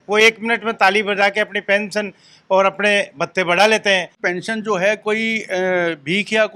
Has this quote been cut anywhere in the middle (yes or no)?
yes